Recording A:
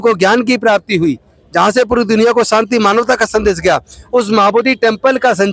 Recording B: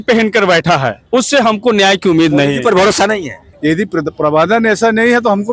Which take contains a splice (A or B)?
B